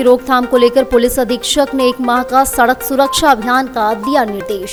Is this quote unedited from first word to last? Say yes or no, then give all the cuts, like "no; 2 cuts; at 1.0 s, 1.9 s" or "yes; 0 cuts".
yes; 0 cuts